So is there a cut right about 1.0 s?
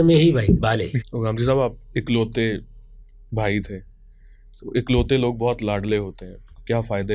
yes; 1 cut; at 1.0 s

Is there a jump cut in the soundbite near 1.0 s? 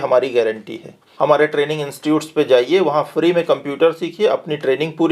yes; 1 cut; at 1.0 s

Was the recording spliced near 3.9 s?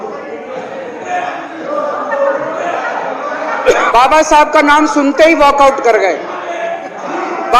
yes; 1 cut; at 3.9 s

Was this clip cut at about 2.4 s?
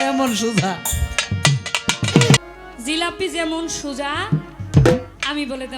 yes; 1 cut; at 2.4 s

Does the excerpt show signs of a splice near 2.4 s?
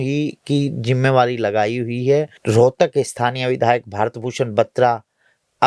yes; 1 cut; at 2.4 s

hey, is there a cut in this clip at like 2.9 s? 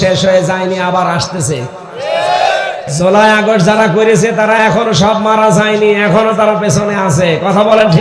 yes; 1 cut; at 2.9 s

